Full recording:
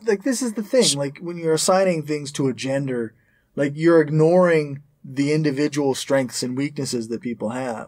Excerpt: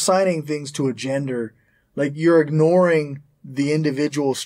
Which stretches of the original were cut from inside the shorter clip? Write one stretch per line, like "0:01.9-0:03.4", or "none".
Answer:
none